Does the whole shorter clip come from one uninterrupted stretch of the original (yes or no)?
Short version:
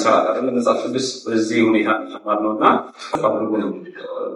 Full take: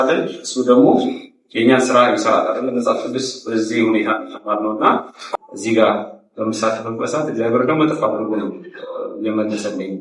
no